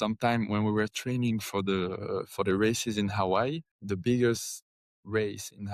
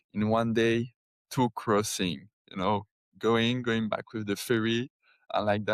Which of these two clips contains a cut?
first; 1 cut; at 3.7 s

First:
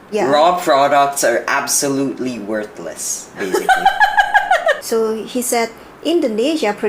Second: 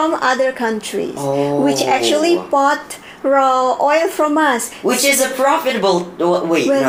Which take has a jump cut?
first; 1 cut; at 4.8 s

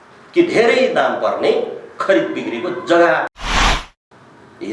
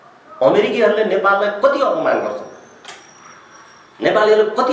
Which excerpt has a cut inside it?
first; 1 cut; at 3.7 s

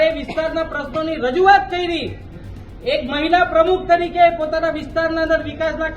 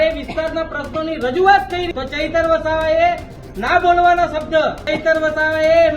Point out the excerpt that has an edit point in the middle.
second; 2 cuts; at 1.9 s, 4.9 s

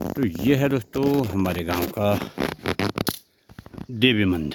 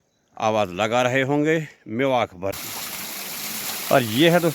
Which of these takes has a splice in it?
second; 1 cut; at 2.6 s

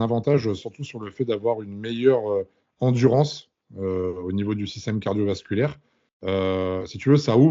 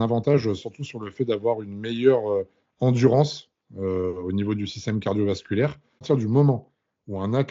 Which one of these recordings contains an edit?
second; 1 cut; at 6.0 s

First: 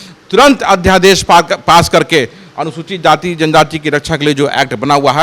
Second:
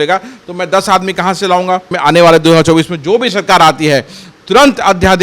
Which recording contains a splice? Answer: second; 1 cut; at 1.9 s

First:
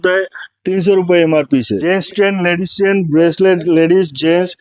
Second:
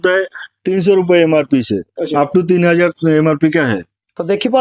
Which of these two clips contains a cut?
first; 1 cut; at 1.8 s

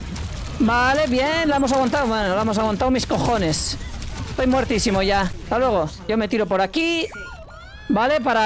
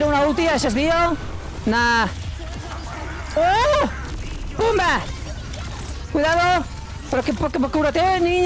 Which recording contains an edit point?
first; 1 cut; at 5.4 s

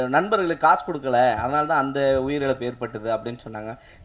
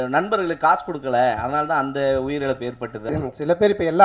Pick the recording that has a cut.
second; 1 cut; at 3.1 s

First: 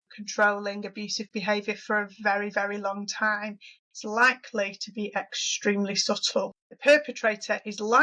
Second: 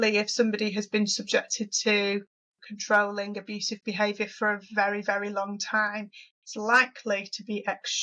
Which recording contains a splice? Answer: first; 1 cut; at 6.6 s

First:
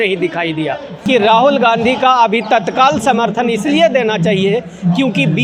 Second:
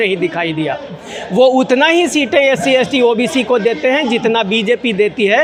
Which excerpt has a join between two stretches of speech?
first; 1 cut; at 0.9 s

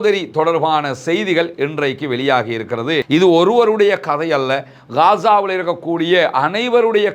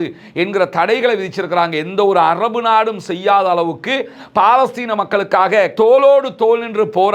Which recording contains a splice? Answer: first; 1 cut; at 3.1 s

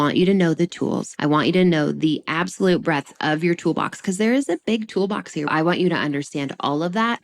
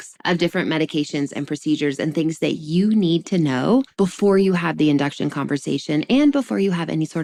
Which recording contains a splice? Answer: first; 1 cut; at 5.5 s

